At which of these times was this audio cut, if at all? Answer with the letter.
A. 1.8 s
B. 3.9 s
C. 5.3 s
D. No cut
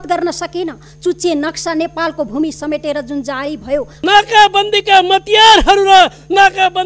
B